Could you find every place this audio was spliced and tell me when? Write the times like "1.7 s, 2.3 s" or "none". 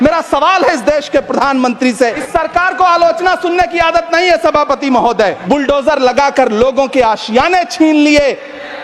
2.2 s, 5.4 s